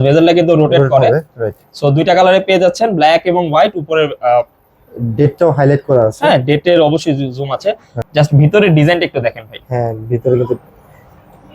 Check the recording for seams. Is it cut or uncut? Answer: cut